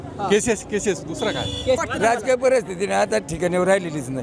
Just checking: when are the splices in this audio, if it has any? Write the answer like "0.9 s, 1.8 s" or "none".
1.8 s